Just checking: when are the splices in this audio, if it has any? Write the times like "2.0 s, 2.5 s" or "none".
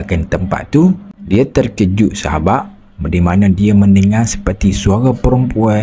1.1 s